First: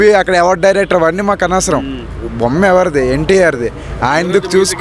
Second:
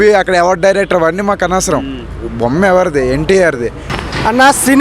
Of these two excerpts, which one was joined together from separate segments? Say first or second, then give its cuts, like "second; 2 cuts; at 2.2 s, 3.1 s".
second; 1 cut; at 3.8 s